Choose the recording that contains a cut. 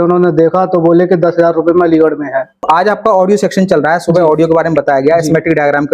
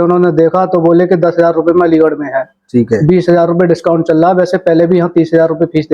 first; 1 cut; at 2.6 s

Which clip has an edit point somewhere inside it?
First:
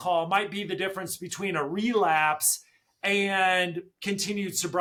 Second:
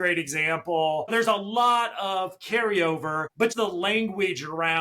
second; 2 cuts; at 1.1 s, 3.5 s

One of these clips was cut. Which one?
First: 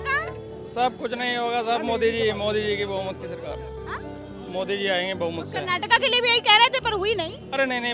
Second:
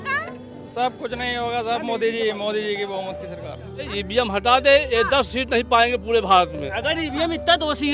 second; 1 cut; at 3.7 s

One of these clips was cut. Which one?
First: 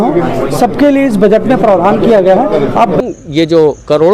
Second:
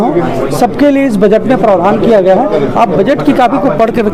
first; 1 cut; at 3.0 s

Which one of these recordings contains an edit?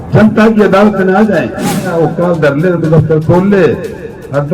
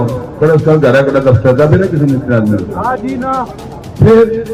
first; 1 cut; at 1.9 s

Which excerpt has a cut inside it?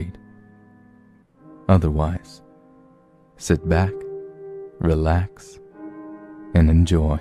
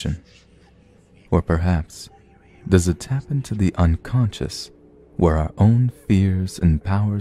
first; 1 cut; at 3.6 s

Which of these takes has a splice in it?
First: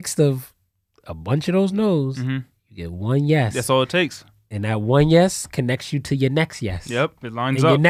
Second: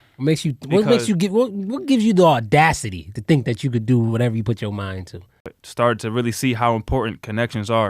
second; 1 cut; at 5.5 s

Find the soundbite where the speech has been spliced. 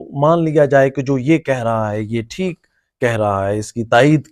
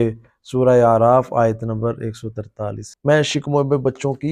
second; 1 cut; at 2.9 s

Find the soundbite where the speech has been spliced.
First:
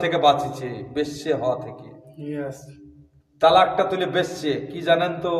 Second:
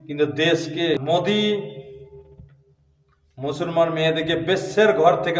second; 1 cut; at 1.0 s

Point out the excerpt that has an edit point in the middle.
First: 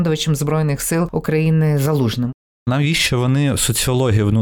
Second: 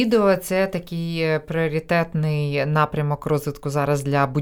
first; 2 cuts; at 1.1 s, 2.6 s

